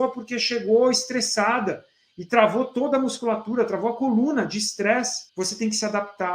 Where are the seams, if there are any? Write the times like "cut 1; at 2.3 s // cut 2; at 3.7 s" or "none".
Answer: cut 1; at 5.2 s